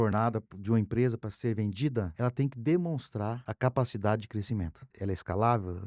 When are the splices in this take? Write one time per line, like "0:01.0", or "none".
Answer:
0:02.1
0:03.5
0:04.8